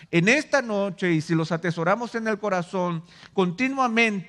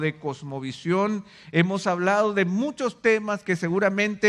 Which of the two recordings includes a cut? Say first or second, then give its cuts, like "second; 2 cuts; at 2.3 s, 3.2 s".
first; 1 cut; at 1.4 s